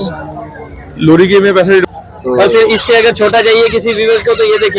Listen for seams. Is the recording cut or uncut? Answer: cut